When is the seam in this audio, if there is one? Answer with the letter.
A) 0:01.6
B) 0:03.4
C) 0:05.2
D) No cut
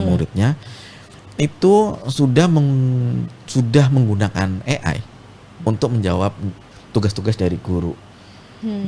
D